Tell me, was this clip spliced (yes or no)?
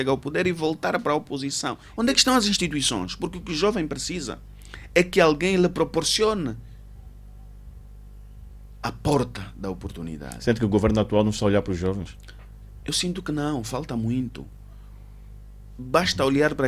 yes